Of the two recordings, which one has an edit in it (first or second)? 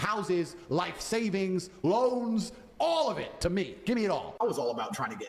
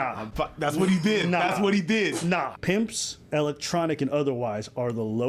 second